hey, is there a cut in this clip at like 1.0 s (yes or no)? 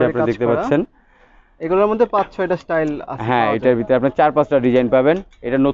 no